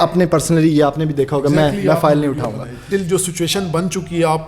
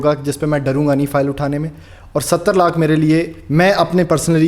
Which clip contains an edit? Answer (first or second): first